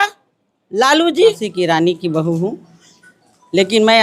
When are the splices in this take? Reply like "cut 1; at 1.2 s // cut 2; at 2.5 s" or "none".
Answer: cut 1; at 1.4 s